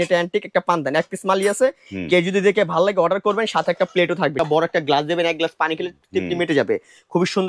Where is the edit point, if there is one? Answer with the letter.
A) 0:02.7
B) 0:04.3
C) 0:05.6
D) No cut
B